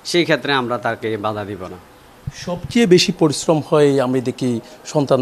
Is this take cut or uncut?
uncut